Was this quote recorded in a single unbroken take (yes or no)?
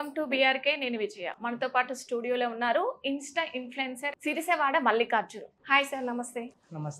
no